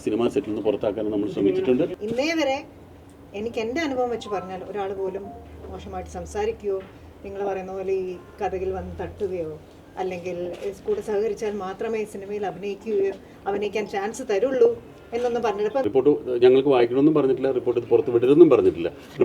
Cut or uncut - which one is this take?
cut